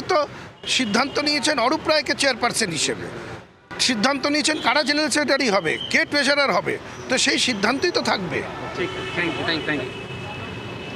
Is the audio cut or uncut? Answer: uncut